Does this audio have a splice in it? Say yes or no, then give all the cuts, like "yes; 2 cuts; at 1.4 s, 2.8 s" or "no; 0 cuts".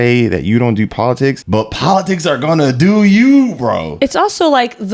yes; 2 cuts; at 1.4 s, 3.9 s